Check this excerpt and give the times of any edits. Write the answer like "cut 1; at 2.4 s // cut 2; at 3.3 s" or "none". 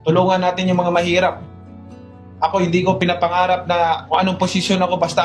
cut 1; at 4.0 s